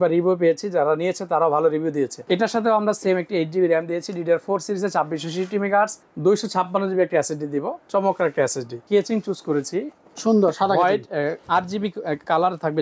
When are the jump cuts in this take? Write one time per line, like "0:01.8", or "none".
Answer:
0:02.2
0:06.0
0:08.8